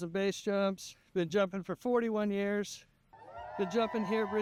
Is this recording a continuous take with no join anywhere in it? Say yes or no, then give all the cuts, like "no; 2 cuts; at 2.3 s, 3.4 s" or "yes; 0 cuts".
yes; 0 cuts